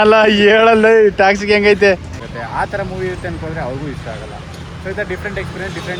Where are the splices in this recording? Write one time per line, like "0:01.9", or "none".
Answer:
0:02.2